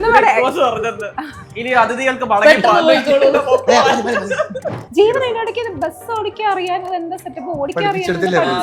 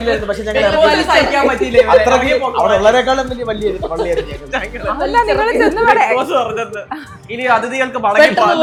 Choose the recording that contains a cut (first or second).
first